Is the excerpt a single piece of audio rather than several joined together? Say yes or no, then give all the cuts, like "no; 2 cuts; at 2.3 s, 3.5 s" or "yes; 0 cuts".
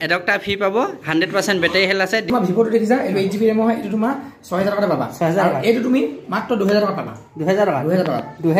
no; 1 cut; at 2.3 s